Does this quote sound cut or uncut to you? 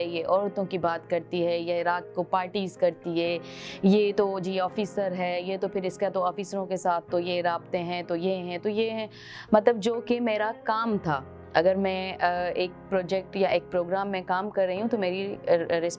uncut